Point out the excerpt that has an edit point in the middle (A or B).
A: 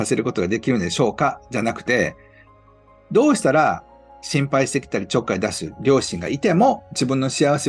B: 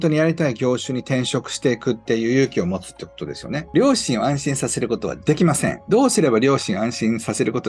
B